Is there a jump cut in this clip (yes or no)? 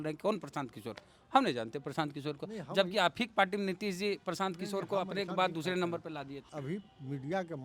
yes